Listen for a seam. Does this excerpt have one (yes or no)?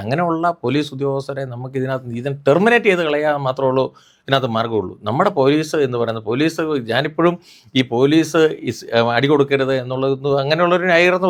no